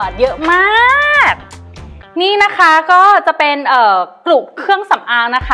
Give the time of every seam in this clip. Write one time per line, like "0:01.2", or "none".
none